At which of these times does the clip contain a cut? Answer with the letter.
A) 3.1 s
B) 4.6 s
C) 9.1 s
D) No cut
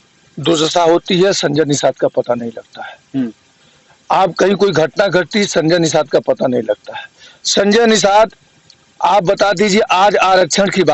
D